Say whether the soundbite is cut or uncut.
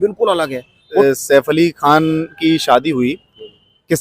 cut